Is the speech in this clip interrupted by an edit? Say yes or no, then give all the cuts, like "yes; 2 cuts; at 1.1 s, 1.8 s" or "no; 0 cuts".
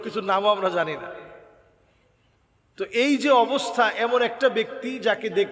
no; 0 cuts